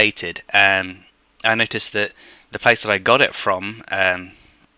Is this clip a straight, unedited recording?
yes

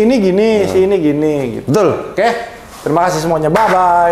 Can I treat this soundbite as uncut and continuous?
yes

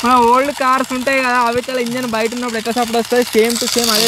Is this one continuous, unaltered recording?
yes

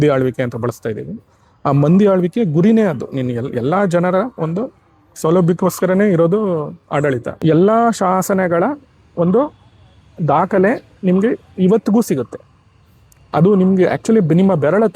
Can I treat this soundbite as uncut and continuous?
no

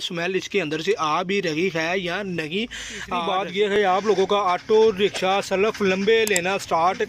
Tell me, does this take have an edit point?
yes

